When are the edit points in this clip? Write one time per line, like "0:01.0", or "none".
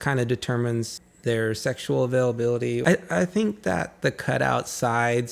0:02.8